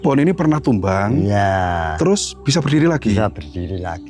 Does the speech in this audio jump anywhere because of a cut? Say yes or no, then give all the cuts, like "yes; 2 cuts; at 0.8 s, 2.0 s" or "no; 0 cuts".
no; 0 cuts